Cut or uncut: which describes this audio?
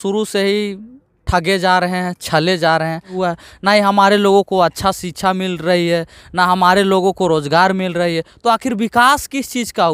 cut